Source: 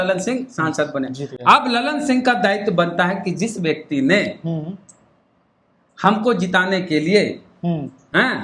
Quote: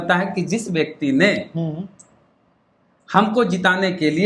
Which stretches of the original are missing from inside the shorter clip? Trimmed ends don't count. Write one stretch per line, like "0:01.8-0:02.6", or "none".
none